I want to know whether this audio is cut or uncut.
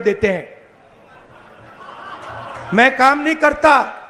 uncut